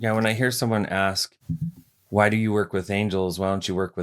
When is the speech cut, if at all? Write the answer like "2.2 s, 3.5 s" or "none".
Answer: none